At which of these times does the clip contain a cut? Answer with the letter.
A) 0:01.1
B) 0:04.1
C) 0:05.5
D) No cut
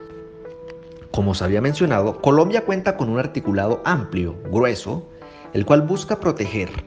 A